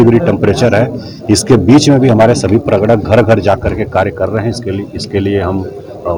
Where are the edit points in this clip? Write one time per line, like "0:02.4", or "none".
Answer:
none